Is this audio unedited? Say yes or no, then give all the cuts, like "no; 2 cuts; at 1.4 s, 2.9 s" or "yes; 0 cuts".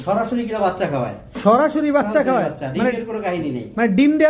yes; 0 cuts